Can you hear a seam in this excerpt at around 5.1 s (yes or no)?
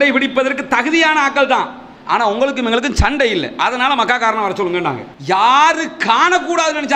yes